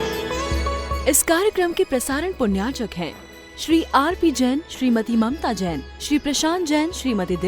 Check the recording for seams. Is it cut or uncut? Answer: cut